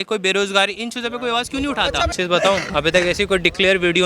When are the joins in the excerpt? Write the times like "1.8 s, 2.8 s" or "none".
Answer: 2.1 s